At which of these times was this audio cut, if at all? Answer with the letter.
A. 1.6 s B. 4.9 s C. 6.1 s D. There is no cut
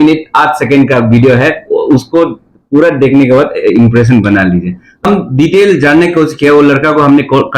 D